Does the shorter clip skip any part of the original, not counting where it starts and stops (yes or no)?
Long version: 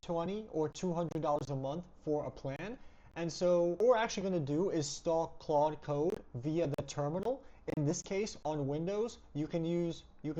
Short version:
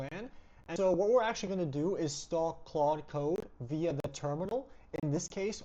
yes